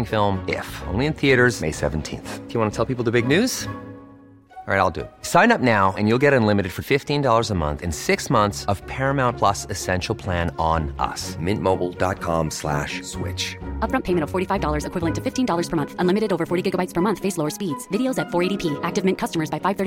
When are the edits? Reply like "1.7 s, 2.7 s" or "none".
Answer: none